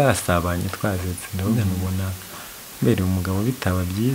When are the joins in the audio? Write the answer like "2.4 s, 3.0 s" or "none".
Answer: none